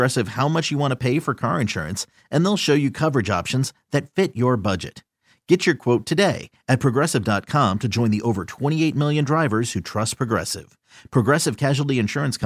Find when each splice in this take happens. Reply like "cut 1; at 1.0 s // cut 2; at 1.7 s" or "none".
none

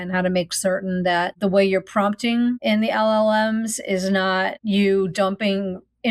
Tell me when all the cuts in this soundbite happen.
cut 1; at 1.3 s // cut 2; at 2.6 s // cut 3; at 4.6 s

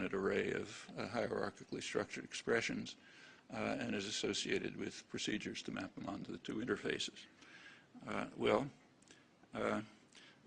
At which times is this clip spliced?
cut 1; at 9.0 s

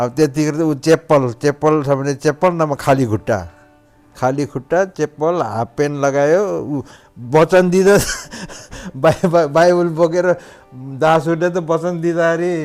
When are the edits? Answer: none

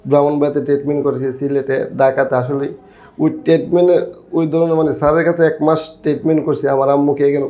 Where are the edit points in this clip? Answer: none

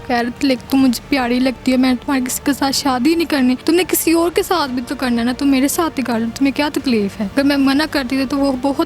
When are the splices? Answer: cut 1; at 3.6 s // cut 2; at 7.2 s

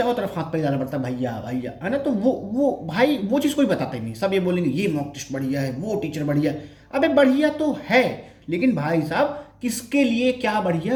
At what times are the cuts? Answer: none

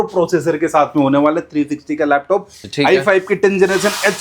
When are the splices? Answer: cut 1; at 2.7 s

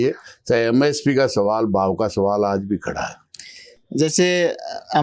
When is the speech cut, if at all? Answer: none

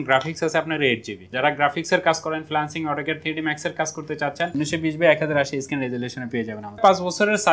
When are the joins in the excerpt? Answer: cut 1; at 1.2 s // cut 2; at 4.5 s // cut 3; at 6.8 s

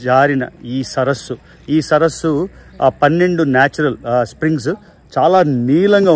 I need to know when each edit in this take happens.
none

